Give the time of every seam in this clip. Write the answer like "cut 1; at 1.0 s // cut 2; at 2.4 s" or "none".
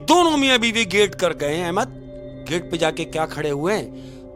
none